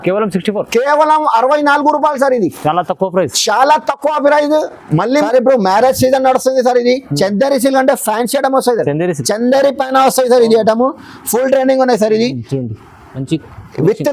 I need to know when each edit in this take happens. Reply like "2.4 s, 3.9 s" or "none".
5.1 s